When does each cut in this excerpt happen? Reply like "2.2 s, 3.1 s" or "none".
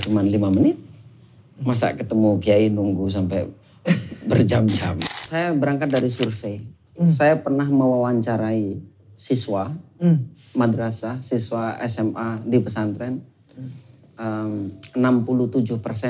5.0 s